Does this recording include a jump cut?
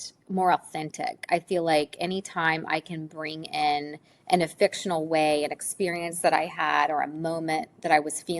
no; 0 cuts

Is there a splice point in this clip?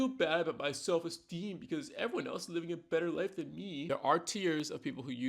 yes; 1 cut; at 3.8 s

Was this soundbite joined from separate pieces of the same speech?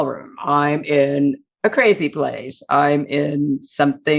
no; 0 cuts

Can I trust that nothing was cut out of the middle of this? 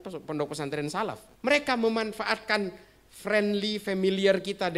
no; 1 cut; at 1.3 s

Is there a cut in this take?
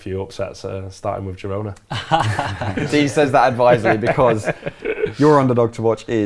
yes; 1 cut; at 2.7 s

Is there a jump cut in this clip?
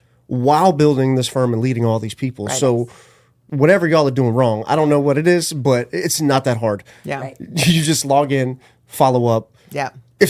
yes; 1 cut; at 3.5 s

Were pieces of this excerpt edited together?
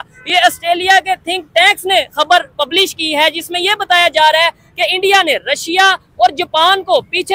no; 0 cuts

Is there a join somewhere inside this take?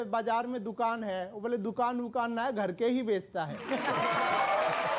no; 0 cuts

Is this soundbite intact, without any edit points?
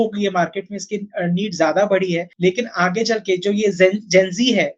no; 1 cut; at 2.3 s

